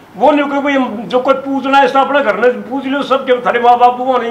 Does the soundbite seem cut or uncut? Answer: uncut